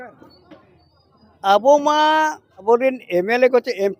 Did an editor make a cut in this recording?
yes; 1 cut; at 2.6 s

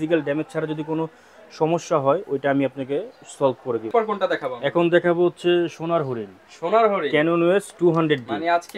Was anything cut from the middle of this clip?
no; 0 cuts

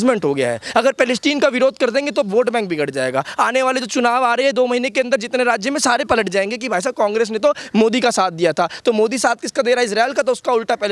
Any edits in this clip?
no; 0 cuts

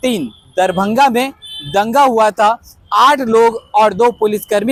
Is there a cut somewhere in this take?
no; 0 cuts

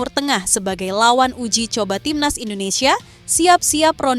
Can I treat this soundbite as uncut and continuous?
yes; 0 cuts

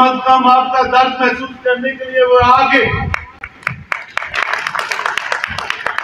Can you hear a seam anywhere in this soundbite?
no; 0 cuts

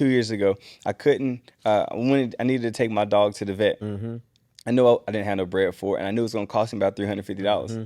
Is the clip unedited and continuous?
yes; 0 cuts

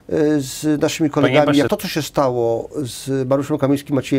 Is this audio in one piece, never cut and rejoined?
no; 1 cut; at 1.7 s

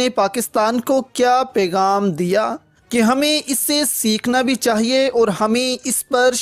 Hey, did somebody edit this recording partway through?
no; 0 cuts

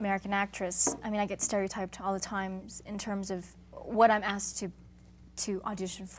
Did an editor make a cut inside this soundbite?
no; 0 cuts

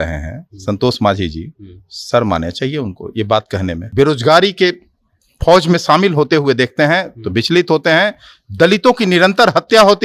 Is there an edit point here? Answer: yes; 1 cut; at 3.8 s

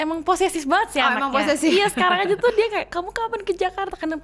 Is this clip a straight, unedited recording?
yes; 0 cuts

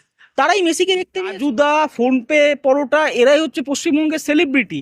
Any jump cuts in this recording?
yes; 1 cut; at 1.3 s

